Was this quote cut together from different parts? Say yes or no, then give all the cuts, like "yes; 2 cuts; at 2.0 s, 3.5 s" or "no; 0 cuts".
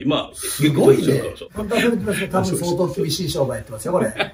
yes; 1 cut; at 1.4 s